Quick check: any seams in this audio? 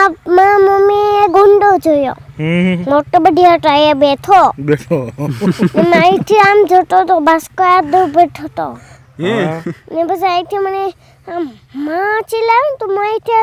no; 0 cuts

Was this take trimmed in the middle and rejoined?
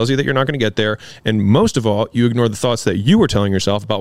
no; 0 cuts

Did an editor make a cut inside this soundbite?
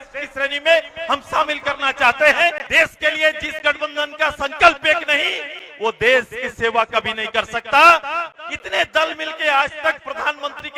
yes; 2 cuts; at 2.6 s, 8.2 s

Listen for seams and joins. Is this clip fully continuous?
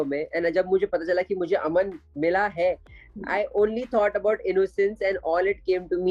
yes; 0 cuts

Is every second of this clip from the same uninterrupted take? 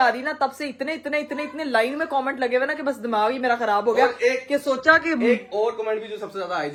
yes; 0 cuts

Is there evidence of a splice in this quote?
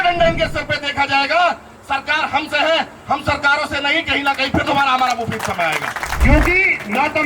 yes; 1 cut; at 6.2 s

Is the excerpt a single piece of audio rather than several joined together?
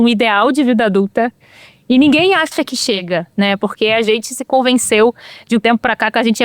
no; 1 cut; at 3.0 s

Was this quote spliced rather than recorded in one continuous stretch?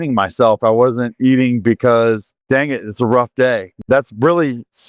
yes; 2 cuts; at 2.3 s, 3.7 s

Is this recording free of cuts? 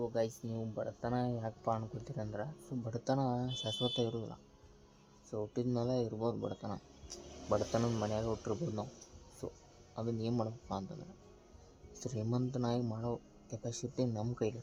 yes; 0 cuts

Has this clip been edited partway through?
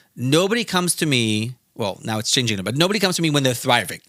no; 0 cuts

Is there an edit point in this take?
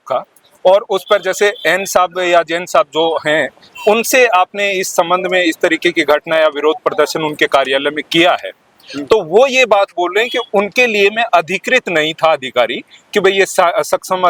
no; 0 cuts

